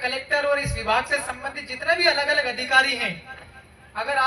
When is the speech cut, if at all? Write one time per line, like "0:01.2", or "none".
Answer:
none